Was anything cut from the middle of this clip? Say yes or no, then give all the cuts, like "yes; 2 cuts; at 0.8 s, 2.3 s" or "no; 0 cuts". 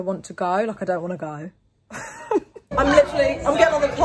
yes; 1 cut; at 2.6 s